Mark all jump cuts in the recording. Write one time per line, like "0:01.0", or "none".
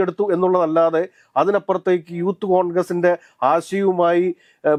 none